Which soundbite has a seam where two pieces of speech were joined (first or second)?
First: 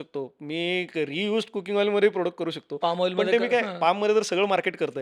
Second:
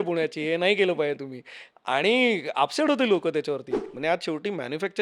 second